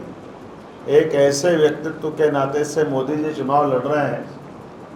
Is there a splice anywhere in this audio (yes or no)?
no